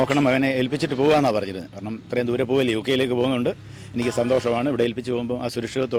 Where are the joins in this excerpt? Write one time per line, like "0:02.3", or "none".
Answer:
none